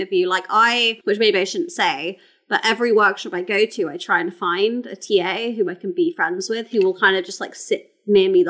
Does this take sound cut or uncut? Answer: cut